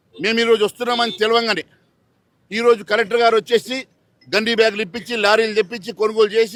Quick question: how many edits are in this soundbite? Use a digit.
0